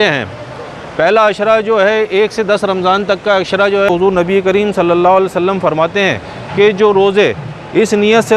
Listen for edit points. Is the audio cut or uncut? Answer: cut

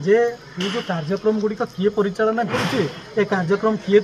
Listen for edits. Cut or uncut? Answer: uncut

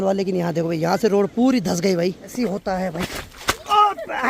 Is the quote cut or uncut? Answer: cut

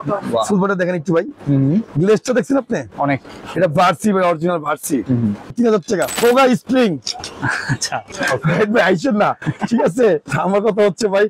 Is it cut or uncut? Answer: cut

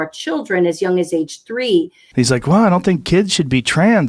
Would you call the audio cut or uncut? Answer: cut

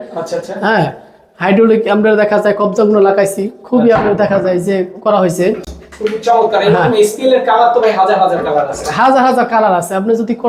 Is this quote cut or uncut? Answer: uncut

